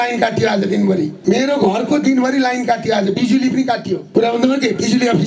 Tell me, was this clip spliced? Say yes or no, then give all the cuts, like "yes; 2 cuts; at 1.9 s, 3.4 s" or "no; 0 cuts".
yes; 2 cuts; at 1.2 s, 4.0 s